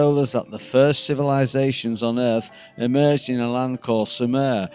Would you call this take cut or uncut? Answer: cut